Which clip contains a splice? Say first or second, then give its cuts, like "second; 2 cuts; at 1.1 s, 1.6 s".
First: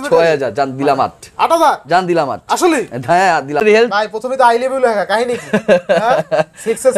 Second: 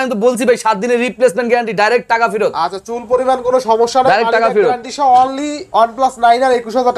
first; 1 cut; at 3.6 s